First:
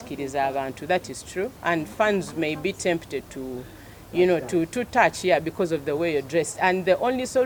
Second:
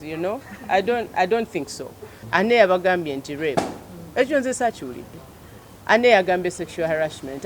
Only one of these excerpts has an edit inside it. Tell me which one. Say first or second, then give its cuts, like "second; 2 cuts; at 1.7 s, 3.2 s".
second; 1 cut; at 2.2 s